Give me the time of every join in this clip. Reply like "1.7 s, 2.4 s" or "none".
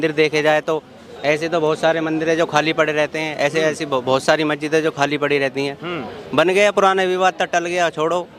none